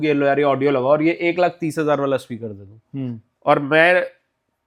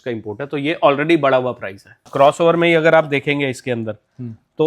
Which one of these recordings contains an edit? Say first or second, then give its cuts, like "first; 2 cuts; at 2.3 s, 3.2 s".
second; 1 cut; at 2.1 s